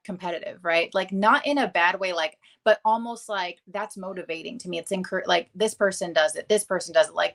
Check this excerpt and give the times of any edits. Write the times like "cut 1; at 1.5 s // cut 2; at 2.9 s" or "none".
none